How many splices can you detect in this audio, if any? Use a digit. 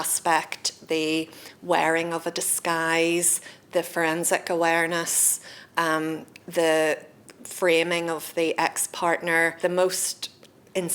1